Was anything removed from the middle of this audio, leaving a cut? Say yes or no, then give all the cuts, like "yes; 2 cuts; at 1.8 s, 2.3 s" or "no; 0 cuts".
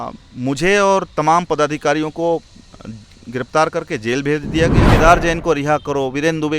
yes; 1 cut; at 4.8 s